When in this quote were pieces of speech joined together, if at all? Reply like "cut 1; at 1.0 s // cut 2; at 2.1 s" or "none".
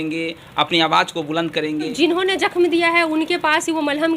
cut 1; at 1.9 s